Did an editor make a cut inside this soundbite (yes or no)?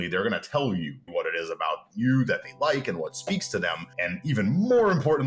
yes